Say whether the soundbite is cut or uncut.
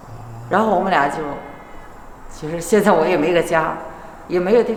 uncut